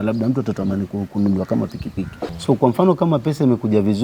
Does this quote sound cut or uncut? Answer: cut